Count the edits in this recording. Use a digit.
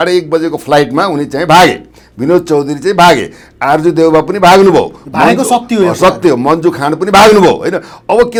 0